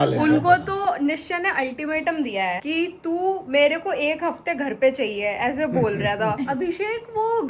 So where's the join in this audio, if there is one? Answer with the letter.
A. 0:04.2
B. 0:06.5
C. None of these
B